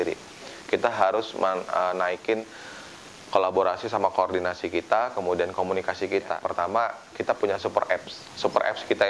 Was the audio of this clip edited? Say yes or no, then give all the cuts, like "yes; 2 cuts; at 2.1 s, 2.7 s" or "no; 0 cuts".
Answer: yes; 1 cut; at 6.4 s